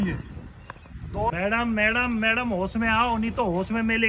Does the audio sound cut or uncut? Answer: cut